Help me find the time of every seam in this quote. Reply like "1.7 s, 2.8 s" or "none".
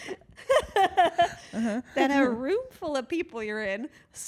none